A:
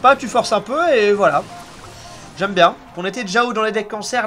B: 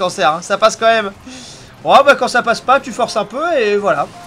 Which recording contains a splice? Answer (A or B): A